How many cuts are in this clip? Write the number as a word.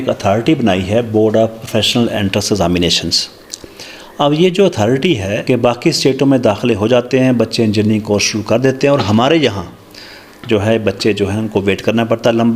one